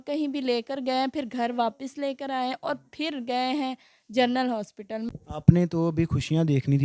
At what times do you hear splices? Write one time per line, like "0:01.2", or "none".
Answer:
0:05.1